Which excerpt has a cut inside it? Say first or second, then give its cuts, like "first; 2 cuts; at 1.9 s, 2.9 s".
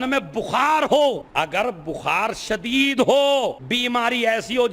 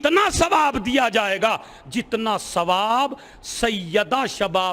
first; 1 cut; at 1.2 s